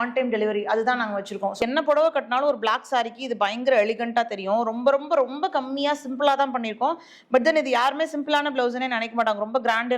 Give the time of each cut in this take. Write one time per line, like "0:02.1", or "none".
0:01.6